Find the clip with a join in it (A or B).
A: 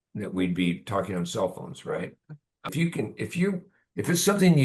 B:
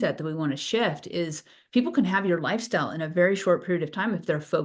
A